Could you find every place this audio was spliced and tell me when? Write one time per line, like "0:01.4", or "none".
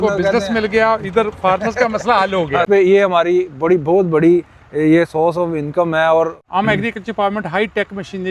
0:02.7
0:06.4